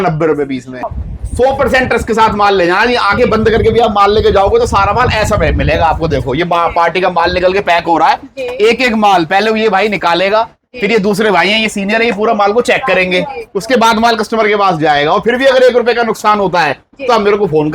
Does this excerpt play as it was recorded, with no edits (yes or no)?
no